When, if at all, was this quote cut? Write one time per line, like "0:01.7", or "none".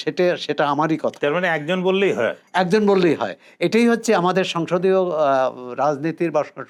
none